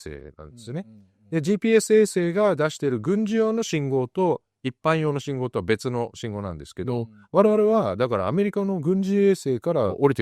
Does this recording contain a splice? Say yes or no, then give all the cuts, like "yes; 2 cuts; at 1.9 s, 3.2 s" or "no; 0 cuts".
no; 0 cuts